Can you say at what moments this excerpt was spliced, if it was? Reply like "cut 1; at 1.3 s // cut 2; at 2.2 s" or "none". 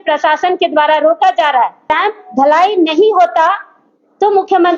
cut 1; at 1.9 s

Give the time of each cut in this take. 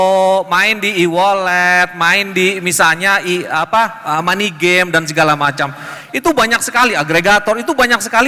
none

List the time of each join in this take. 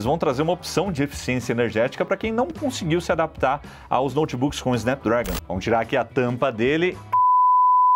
cut 1; at 5.4 s

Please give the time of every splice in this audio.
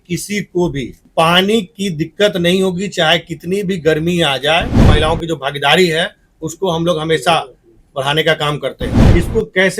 cut 1; at 1.0 s // cut 2; at 4.9 s // cut 3; at 8.9 s

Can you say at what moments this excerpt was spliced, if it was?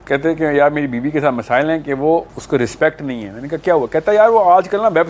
cut 1; at 2.4 s

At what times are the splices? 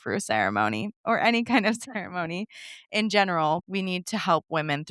cut 1; at 3.6 s

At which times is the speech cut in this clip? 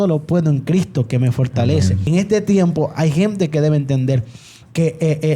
cut 1; at 2.1 s

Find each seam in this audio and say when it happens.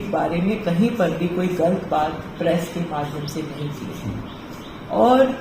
none

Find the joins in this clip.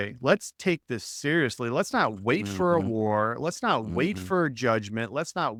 none

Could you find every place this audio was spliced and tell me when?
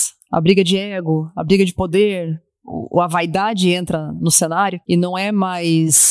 cut 1; at 4.8 s

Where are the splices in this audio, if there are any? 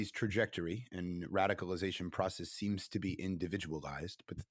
none

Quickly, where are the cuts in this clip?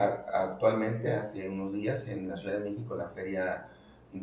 none

